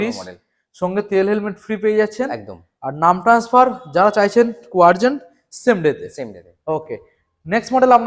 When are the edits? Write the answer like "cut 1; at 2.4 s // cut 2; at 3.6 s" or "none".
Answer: none